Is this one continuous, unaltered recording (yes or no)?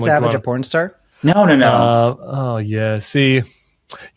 yes